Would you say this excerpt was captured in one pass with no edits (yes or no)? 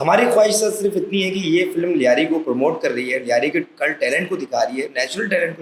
yes